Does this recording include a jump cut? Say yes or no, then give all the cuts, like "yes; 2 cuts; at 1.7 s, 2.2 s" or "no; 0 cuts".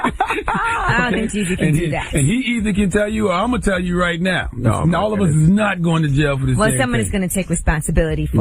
yes; 1 cut; at 5.8 s